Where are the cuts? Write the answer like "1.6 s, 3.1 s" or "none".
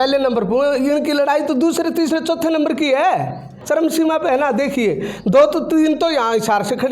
3.5 s